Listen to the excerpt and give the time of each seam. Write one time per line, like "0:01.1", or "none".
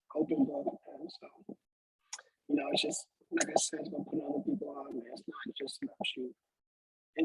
none